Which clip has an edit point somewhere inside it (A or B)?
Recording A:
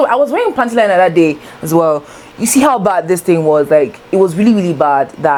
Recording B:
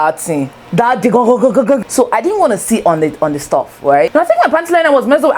B